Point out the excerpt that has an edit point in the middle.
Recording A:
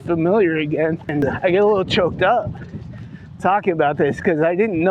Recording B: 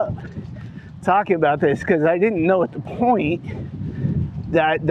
A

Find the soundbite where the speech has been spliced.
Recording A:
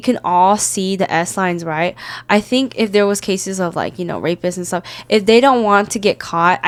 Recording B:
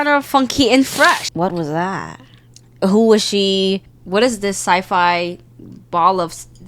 B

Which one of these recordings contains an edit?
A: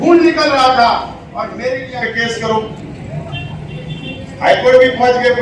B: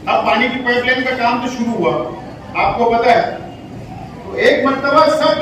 A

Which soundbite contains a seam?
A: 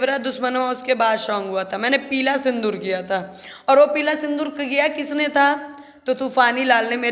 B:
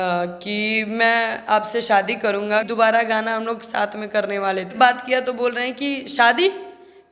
B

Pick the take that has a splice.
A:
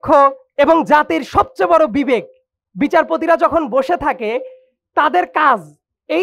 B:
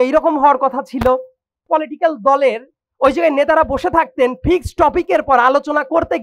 B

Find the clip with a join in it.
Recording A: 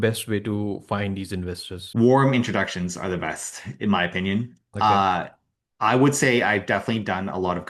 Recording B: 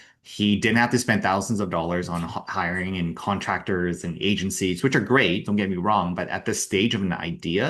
A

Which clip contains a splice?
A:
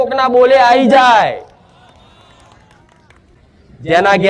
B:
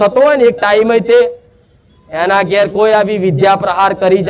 A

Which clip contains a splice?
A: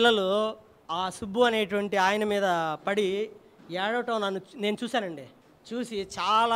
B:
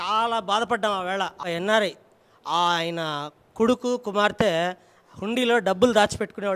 B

